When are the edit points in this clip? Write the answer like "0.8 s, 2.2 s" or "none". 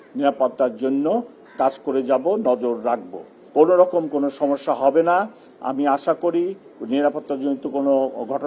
3.3 s